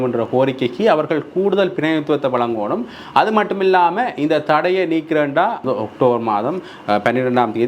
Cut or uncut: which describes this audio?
cut